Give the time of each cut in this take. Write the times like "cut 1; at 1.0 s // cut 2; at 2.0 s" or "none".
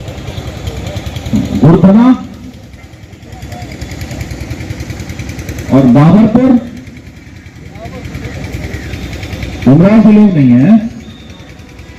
none